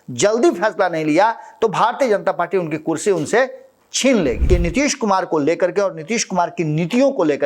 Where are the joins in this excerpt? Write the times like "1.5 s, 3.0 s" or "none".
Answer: 4.4 s